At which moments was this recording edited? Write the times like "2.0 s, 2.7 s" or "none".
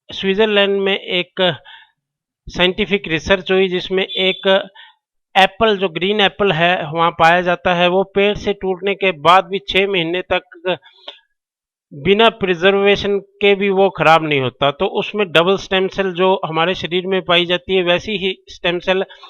7.6 s